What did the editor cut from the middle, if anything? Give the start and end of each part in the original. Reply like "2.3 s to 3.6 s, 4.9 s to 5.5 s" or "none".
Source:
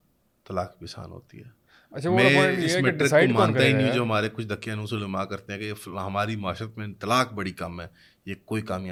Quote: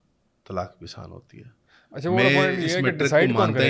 none